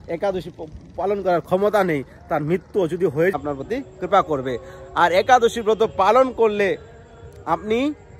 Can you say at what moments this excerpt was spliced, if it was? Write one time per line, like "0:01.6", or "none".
0:03.3